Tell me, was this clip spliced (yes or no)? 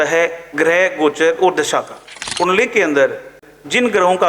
yes